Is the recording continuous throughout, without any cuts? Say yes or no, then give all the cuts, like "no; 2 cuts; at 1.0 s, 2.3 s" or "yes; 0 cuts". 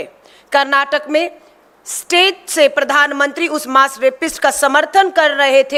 yes; 0 cuts